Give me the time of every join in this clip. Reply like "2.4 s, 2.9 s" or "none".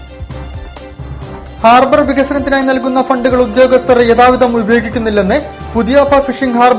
none

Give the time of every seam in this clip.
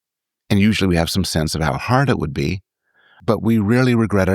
3.2 s

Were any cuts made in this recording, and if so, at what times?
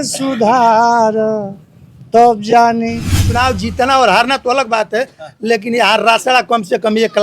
3.2 s

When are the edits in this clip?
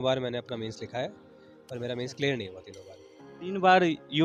none

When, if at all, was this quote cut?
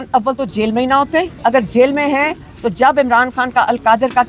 1.3 s

